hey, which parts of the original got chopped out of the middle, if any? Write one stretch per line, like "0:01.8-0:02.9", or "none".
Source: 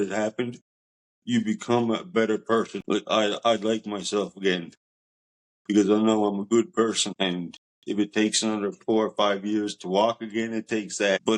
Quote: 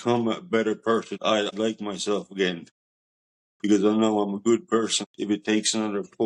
0:03.1-0:03.5
0:07.1-0:07.7